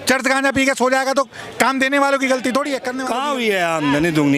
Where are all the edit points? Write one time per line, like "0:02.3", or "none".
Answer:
0:02.9